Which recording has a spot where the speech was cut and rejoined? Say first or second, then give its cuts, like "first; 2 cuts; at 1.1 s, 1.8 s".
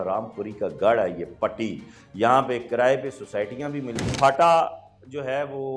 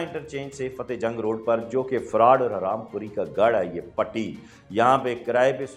first; 1 cut; at 4.1 s